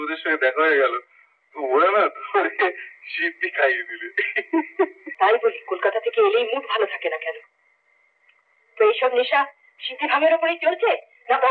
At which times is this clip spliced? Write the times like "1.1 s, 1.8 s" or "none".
5.0 s